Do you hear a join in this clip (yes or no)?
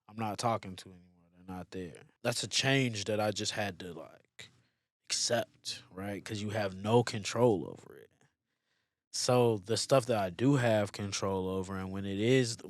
yes